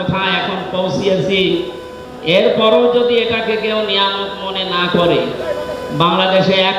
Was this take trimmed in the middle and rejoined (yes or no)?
yes